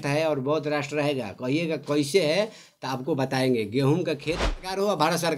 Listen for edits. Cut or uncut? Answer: cut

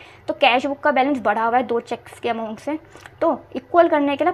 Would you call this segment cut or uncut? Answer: uncut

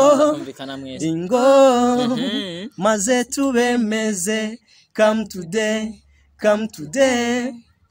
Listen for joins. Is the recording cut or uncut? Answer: uncut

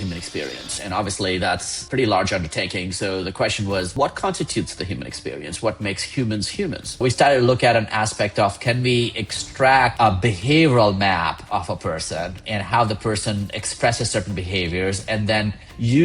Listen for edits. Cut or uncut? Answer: cut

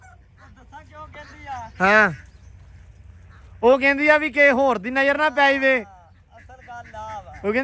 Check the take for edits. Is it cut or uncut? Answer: uncut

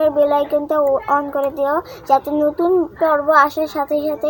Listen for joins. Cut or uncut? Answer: uncut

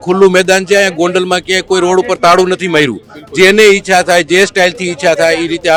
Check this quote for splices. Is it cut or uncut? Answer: uncut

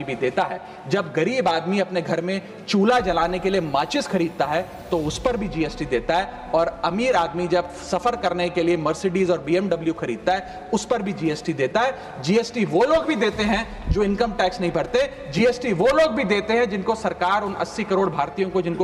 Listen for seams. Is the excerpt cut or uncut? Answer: uncut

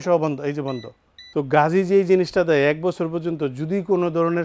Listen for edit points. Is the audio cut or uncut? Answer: cut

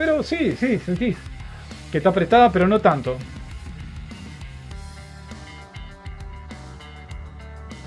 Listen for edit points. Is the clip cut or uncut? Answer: uncut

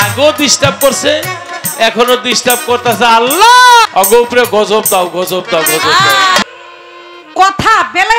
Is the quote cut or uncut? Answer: cut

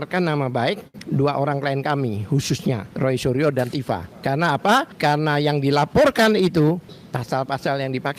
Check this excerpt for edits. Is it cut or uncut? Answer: cut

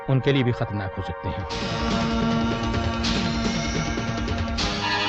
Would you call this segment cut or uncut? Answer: cut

